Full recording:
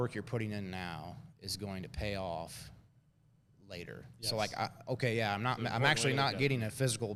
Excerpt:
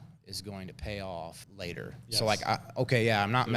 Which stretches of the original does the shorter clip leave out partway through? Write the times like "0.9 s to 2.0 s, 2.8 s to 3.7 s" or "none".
2.6 s to 3.5 s